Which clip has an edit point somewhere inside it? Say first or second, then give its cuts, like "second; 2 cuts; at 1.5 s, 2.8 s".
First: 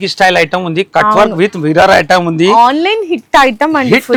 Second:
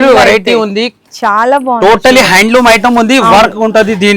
second; 1 cut; at 1.0 s